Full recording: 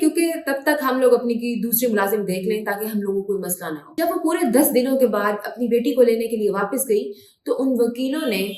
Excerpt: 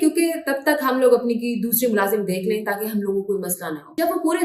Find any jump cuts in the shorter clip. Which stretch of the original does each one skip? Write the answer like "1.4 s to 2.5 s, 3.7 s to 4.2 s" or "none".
none